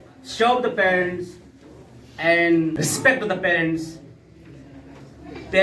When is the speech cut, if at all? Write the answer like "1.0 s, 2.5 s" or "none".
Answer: 2.7 s